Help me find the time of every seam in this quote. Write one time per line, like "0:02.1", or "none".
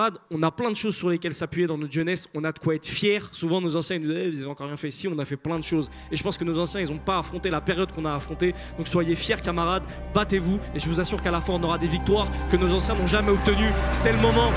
none